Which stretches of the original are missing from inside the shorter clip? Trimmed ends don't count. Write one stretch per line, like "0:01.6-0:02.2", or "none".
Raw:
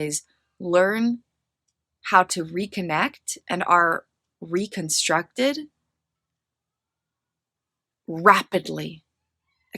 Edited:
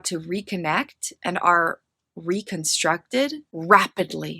0:05.7-0:08.0